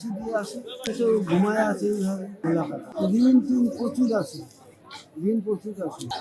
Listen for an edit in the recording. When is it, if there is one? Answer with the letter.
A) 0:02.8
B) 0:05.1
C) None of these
A